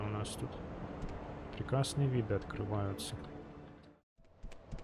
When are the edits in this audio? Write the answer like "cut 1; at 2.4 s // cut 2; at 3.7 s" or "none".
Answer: cut 1; at 3.8 s